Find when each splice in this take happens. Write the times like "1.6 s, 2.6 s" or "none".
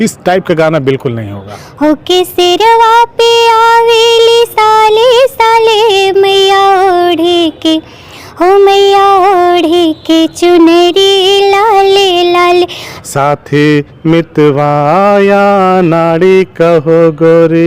1.6 s, 12.9 s